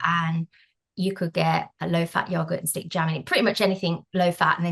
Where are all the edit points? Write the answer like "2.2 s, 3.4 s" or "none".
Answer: none